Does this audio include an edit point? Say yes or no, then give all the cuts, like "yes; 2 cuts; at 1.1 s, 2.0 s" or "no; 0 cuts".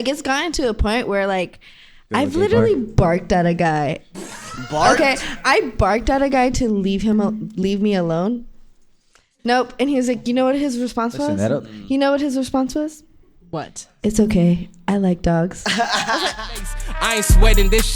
yes; 1 cut; at 16.7 s